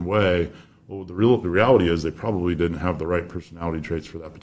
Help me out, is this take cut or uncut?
uncut